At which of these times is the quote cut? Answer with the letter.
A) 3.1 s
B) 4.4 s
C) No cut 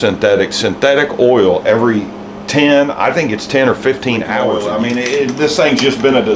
B